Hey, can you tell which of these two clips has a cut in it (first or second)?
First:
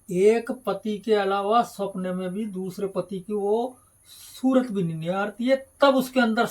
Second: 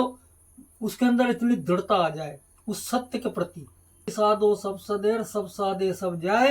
second